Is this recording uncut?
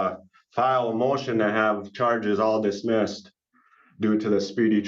yes; 0 cuts

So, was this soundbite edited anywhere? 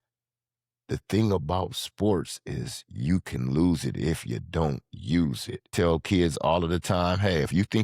yes; 1 cut; at 5.7 s

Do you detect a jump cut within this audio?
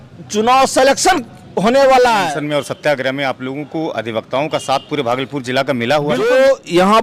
yes; 2 cuts; at 2.3 s, 6.2 s

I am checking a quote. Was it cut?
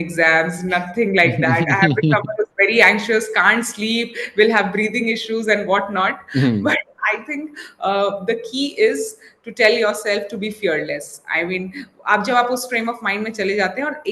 no; 0 cuts

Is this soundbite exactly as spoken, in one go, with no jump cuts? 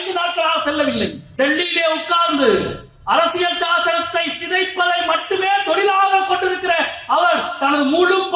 no; 1 cut; at 1.2 s

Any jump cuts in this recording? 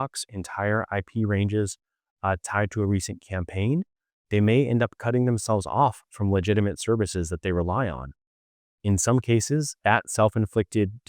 yes; 1 cut; at 9.8 s

